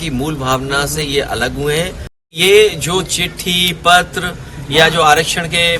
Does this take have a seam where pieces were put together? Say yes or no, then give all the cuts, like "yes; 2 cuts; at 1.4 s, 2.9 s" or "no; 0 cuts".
yes; 1 cut; at 2.3 s